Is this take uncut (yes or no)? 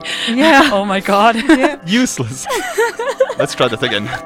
yes